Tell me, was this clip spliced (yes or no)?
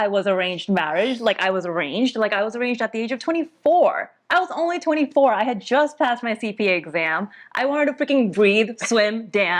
no